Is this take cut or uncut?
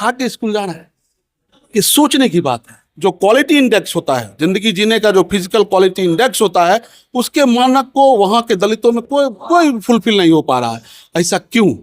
cut